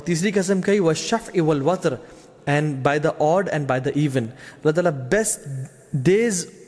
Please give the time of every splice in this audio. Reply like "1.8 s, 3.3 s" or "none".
none

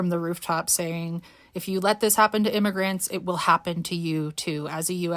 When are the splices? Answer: none

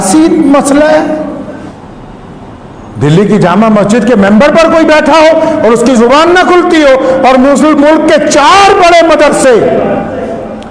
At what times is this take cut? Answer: 1.7 s

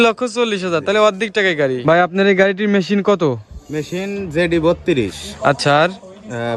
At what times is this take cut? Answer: 1.8 s

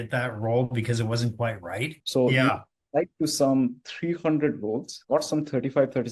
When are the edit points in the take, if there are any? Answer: 2.0 s

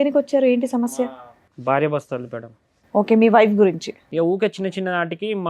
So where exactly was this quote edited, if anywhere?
3.9 s

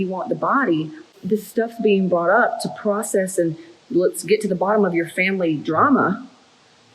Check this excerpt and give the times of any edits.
1.2 s

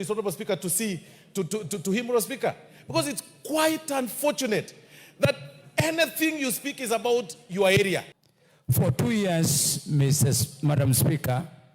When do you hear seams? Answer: 8.3 s

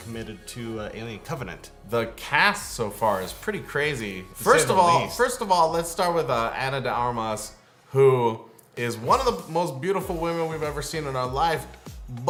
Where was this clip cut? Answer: none

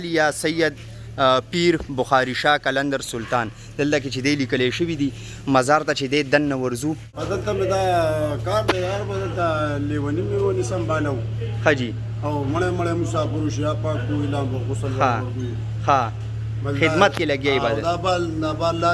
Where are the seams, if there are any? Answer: 7.1 s

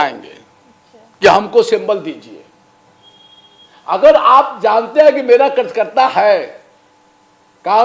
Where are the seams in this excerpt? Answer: none

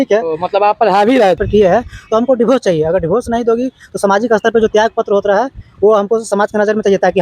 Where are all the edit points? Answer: 1.4 s

